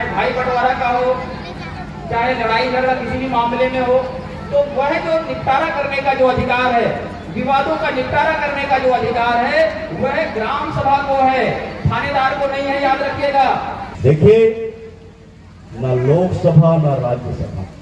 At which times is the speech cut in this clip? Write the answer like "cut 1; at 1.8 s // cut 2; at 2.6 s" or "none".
cut 1; at 13.8 s